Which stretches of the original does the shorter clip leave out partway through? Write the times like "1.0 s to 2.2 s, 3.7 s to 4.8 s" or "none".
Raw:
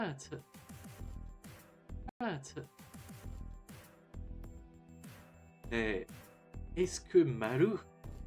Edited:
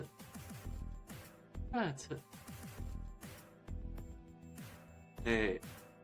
2.1 s to 2.2 s

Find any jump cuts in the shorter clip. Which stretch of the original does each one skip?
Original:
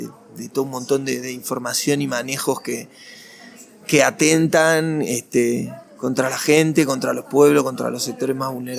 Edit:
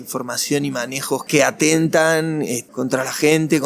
2.6 s to 3.8 s, 5.2 s to 5.9 s

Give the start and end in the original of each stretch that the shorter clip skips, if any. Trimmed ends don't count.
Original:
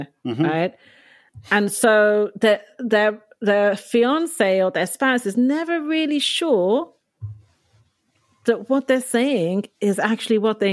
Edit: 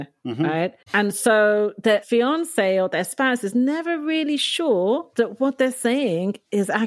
0.8 s to 1.4 s, 2.6 s to 3.9 s, 6.9 s to 8.4 s

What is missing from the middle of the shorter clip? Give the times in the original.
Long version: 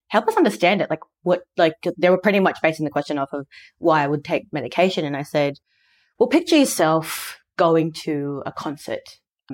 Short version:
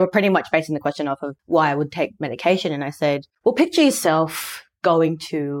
3.4 s to 3.6 s, 5.6 s to 6.0 s

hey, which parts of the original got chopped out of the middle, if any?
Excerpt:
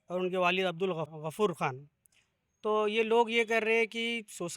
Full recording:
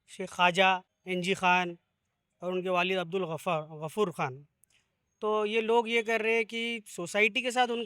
3.4 s to 3.7 s

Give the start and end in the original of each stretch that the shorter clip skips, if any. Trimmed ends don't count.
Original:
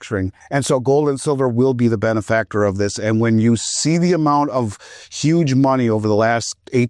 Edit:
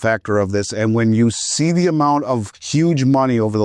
4.8 s to 5.1 s

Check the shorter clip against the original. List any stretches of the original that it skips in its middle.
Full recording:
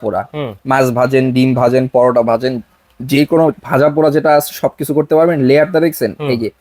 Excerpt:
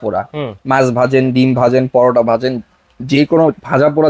none

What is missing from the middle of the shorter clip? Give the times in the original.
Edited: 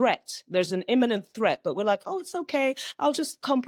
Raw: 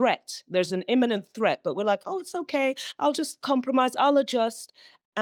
none

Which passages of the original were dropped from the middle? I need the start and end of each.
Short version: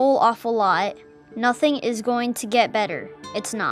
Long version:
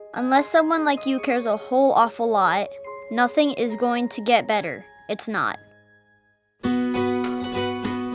none

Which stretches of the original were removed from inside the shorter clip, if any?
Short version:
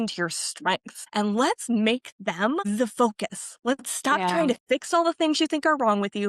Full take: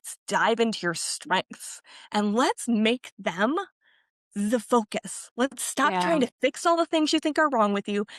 1.6 s to 1.9 s, 3.6 s to 4.4 s

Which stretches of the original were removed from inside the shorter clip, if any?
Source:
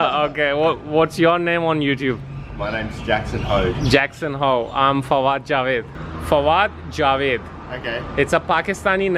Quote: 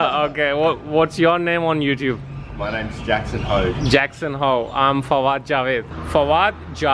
5.9 s to 6.1 s

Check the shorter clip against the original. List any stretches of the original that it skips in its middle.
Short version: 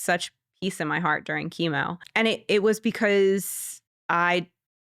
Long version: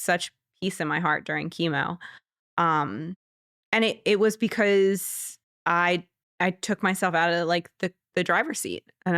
2.0 s to 3.6 s

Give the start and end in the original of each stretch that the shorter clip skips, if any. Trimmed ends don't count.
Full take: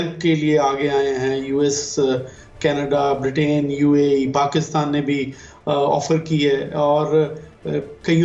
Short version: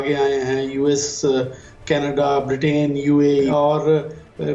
4.2 s to 6.8 s

